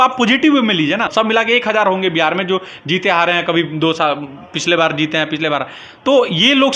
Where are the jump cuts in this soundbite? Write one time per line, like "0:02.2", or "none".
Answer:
0:01.1